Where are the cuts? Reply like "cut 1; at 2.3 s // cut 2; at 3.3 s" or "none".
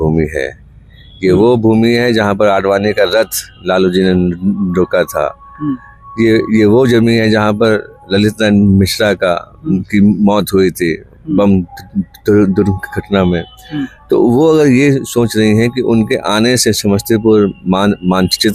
none